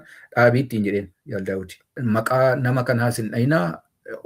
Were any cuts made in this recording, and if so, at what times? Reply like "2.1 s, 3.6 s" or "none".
2.0 s